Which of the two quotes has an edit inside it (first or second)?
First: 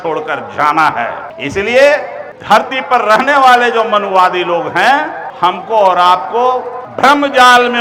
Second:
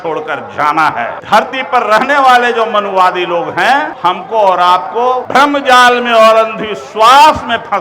second